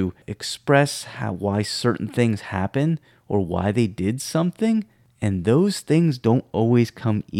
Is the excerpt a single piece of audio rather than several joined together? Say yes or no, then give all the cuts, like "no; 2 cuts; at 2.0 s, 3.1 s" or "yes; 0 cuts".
yes; 0 cuts